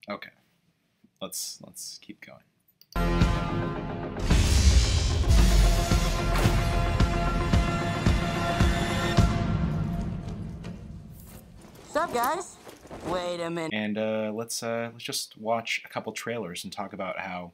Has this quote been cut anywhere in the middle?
no; 0 cuts

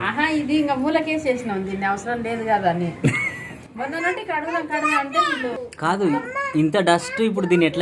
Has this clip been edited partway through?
no; 0 cuts

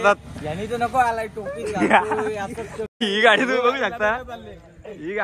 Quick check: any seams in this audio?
yes; 1 cut; at 2.9 s

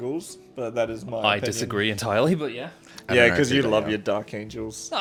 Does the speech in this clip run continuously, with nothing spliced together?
yes; 0 cuts

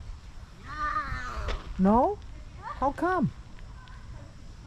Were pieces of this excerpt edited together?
yes; 1 cut; at 3.4 s

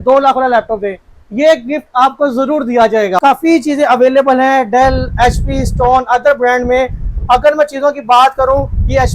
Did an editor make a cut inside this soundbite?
yes; 1 cut; at 3.2 s

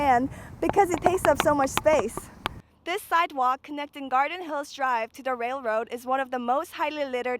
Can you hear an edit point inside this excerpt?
yes; 1 cut; at 2.4 s

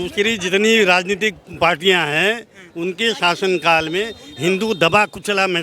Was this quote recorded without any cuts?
yes; 0 cuts

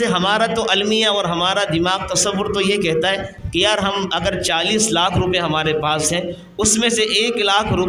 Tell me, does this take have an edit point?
yes; 1 cut; at 3.4 s

